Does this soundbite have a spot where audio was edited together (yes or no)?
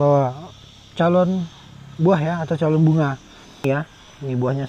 yes